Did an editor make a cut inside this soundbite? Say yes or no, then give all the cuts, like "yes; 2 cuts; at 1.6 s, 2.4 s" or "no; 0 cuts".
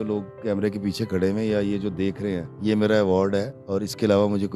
yes; 2 cuts; at 2.5 s, 3.6 s